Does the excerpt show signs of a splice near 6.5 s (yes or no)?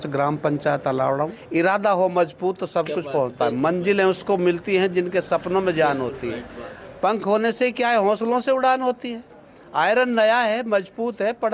no